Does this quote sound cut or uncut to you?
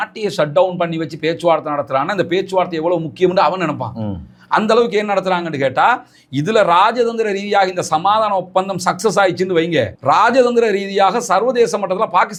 uncut